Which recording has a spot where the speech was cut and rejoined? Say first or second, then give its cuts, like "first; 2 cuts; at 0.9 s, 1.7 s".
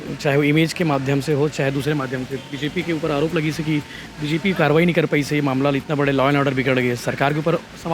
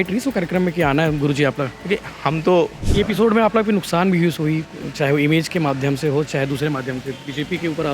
second; 1 cut; at 2.8 s